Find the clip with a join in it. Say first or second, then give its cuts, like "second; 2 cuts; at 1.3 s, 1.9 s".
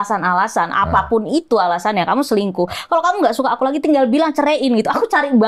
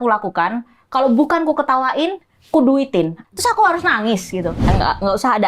second; 2 cuts; at 3.3 s, 4.7 s